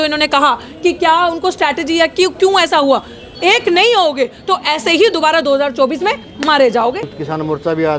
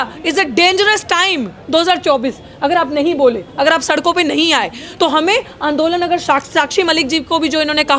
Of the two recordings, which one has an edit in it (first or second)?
first